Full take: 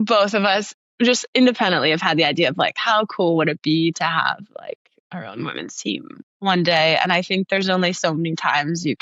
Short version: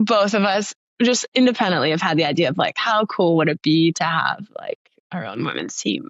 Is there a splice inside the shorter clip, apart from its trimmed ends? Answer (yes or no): no